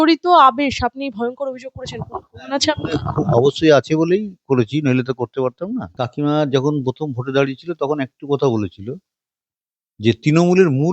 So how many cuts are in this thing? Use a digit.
1